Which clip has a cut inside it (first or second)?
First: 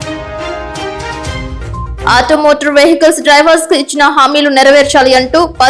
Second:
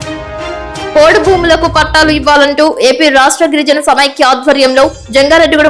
second